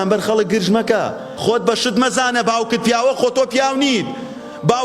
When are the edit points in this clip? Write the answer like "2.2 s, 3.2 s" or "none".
1.2 s